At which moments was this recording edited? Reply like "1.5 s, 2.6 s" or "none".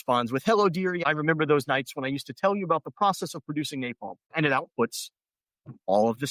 1.0 s, 4.3 s